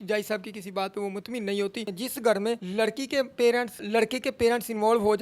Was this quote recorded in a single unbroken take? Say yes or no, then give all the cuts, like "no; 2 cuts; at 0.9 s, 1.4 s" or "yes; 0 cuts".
no; 3 cuts; at 1.9 s, 2.7 s, 3.8 s